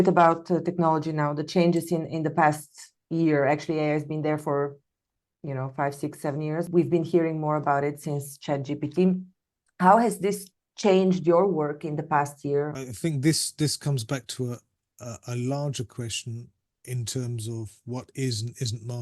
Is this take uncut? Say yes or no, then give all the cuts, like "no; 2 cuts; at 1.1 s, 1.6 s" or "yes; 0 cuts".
no; 2 cuts; at 6.7 s, 12.8 s